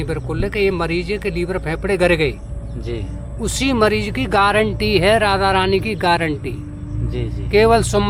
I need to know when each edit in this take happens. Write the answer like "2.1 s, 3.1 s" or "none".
none